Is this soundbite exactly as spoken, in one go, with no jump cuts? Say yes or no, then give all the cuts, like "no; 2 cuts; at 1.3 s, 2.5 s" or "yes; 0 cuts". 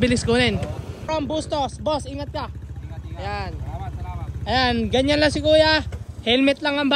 no; 1 cut; at 0.9 s